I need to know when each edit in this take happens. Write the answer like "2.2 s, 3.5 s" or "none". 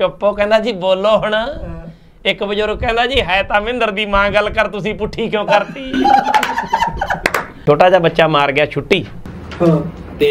7.6 s